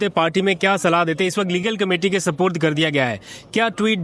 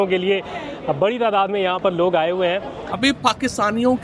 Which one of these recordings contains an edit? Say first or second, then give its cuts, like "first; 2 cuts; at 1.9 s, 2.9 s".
second; 1 cut; at 2.8 s